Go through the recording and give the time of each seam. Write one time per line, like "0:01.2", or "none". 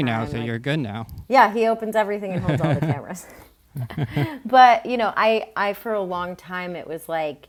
none